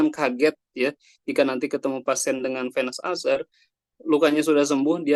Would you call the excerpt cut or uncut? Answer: uncut